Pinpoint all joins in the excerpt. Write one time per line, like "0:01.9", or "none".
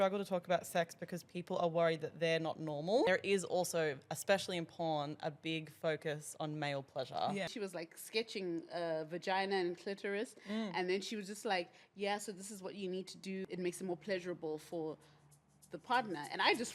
0:03.1
0:07.5
0:13.4